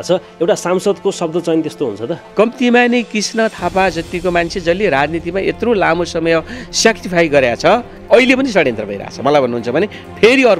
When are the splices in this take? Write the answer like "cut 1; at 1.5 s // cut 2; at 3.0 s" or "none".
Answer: cut 1; at 2.2 s // cut 2; at 7.9 s